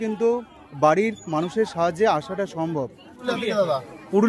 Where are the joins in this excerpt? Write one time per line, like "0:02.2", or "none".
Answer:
0:03.2